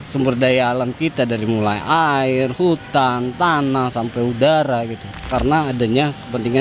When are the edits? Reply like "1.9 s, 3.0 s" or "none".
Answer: 5.3 s

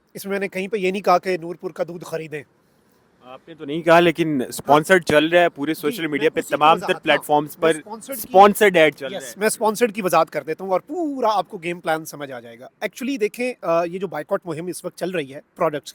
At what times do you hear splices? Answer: none

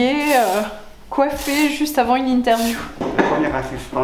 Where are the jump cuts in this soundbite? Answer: 3.0 s

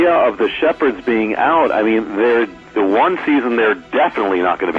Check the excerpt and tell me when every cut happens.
none

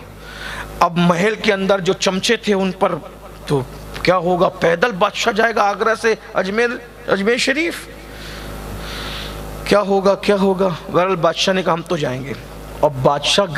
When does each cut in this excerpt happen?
none

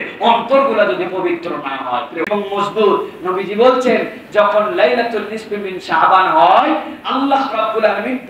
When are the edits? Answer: 2.3 s

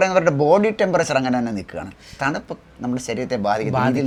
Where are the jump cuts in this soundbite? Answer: none

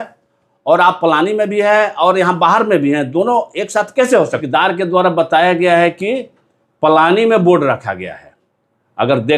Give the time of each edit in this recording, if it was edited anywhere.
4.4 s

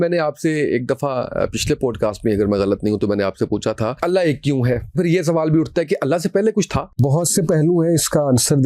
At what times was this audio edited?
4.0 s, 4.9 s, 7.0 s

